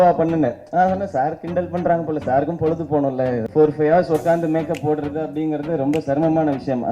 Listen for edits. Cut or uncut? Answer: cut